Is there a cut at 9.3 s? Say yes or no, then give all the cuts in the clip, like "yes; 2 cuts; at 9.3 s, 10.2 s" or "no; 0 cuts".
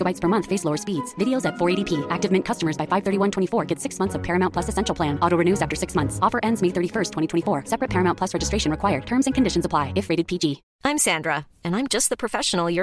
no; 1 cut; at 10.7 s